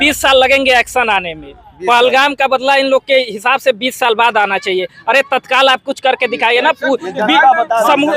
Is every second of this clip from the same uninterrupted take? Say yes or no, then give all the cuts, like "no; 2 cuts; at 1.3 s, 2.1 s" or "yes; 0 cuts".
yes; 0 cuts